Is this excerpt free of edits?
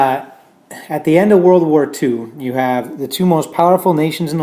no; 1 cut; at 1.5 s

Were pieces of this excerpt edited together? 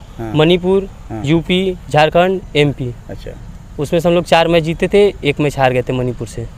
no; 0 cuts

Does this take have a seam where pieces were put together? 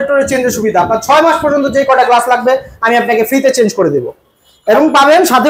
no; 0 cuts

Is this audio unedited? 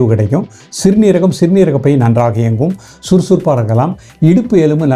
yes; 0 cuts

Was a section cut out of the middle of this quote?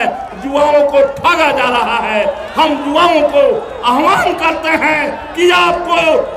no; 0 cuts

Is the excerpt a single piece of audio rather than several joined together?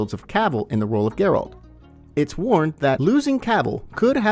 no; 1 cut; at 3.0 s

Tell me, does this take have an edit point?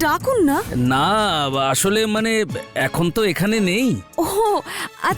no; 0 cuts

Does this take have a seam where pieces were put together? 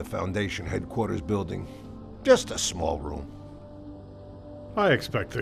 no; 0 cuts

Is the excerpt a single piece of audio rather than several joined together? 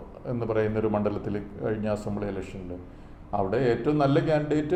yes; 0 cuts

